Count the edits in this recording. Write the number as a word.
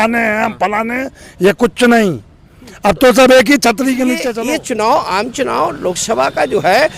one